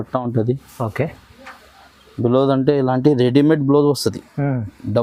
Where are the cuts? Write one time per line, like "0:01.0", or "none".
none